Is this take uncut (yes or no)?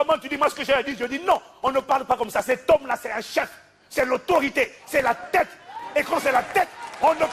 yes